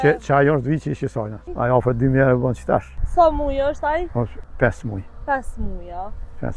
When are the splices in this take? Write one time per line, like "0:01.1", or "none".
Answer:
0:01.4
0:03.0
0:04.4

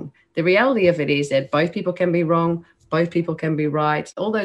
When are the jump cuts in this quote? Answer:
none

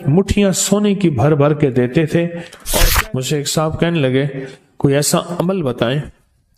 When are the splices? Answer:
0:02.9

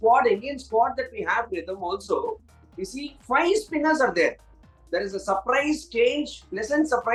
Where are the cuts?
none

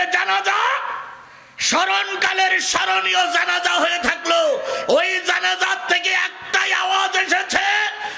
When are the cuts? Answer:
none

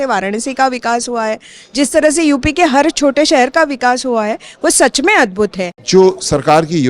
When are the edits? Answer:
0:05.7

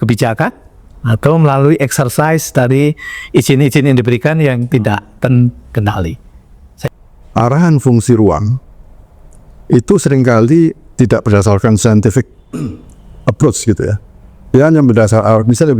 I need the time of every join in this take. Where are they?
0:06.6

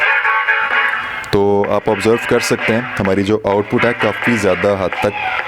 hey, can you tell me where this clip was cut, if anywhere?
none

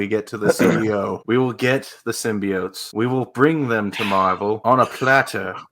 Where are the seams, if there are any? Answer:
0:01.2
0:02.8
0:04.6

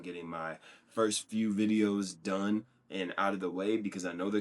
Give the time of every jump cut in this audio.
none

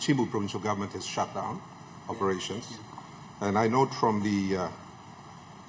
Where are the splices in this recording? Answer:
none

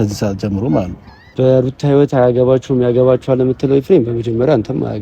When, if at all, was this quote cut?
0:01.2

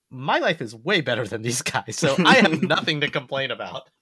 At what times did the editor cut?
none

